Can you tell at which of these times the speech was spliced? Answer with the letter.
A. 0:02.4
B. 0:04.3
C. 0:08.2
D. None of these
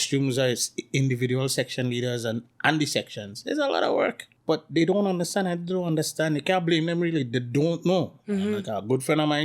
B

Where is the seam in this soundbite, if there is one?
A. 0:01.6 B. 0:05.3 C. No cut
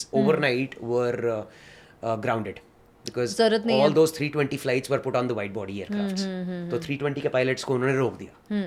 C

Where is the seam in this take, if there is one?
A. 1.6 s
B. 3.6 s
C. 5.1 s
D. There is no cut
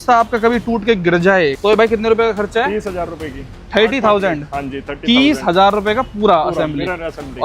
A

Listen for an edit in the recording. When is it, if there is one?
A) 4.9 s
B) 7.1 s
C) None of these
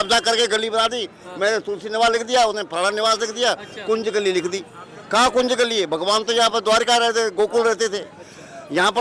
C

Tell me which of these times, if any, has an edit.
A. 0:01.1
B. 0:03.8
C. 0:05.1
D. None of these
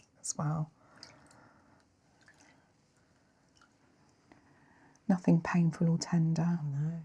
B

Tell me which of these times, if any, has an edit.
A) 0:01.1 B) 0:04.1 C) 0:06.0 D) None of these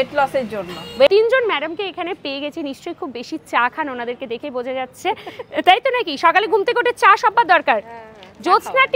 A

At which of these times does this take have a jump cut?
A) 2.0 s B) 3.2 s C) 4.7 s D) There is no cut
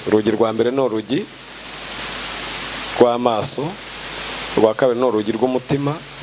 D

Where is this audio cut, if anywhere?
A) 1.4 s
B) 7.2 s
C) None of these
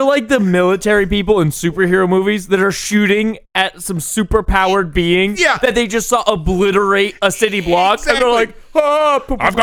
C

